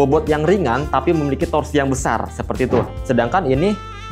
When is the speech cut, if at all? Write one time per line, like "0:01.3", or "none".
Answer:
0:02.9